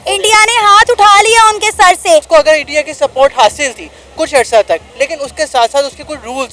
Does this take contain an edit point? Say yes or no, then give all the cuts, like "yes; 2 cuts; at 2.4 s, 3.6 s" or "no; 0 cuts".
yes; 1 cut; at 2.3 s